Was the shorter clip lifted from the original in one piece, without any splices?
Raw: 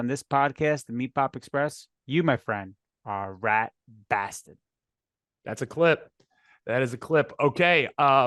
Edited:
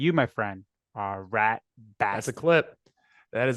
no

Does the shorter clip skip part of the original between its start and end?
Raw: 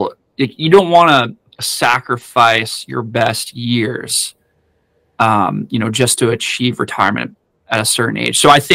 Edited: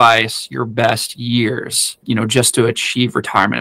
yes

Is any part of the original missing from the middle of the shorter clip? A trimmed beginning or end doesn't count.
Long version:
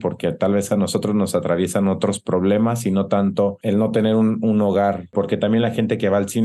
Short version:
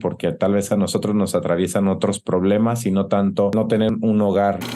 yes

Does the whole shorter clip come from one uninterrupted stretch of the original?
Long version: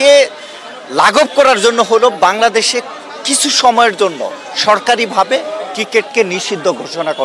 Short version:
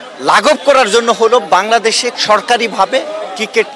no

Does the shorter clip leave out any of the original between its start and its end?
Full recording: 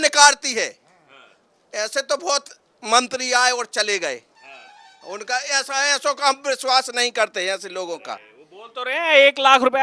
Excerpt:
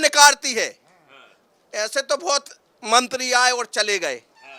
no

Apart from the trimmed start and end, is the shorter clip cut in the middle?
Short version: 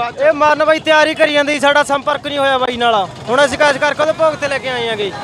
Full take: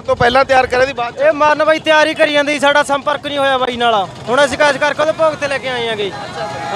no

